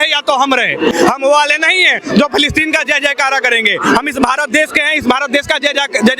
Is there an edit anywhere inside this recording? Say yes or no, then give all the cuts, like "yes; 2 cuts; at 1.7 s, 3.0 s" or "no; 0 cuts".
yes; 1 cut; at 0.9 s